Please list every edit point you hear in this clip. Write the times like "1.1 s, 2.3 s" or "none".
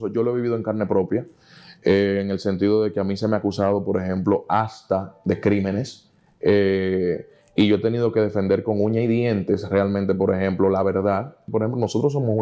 11.4 s